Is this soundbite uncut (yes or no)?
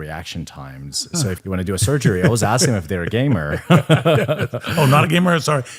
no